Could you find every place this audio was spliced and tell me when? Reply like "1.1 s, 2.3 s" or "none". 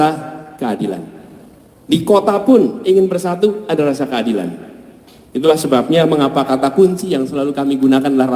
none